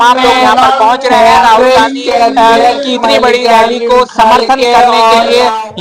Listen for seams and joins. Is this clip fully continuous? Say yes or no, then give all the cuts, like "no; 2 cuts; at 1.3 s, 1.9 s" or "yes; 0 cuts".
yes; 0 cuts